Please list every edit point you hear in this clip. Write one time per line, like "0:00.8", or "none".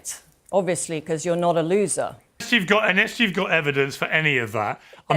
0:02.4